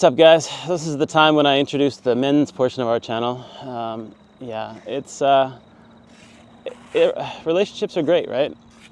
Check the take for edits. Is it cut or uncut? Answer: uncut